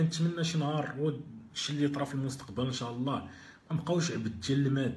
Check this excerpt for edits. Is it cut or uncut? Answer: uncut